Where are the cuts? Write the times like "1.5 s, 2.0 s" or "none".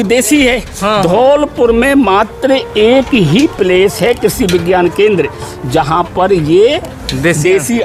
none